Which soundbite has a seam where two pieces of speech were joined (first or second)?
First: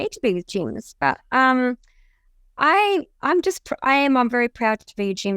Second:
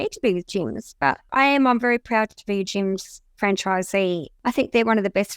second